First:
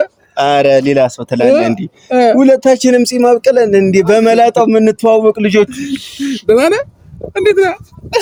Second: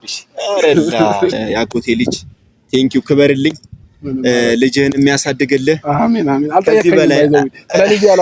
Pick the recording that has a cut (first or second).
second